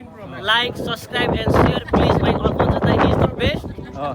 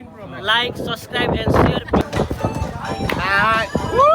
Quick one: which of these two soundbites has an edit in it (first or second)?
second